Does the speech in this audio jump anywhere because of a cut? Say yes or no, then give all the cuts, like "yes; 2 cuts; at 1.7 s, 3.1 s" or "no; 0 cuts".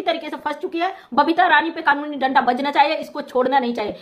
yes; 1 cut; at 1.0 s